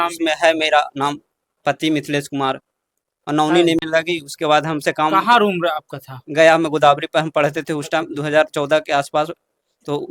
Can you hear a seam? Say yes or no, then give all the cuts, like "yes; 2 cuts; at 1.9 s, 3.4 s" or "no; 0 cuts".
yes; 1 cut; at 3.8 s